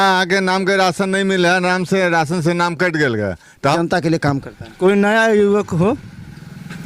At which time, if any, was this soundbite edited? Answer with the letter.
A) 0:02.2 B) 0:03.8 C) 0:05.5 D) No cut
B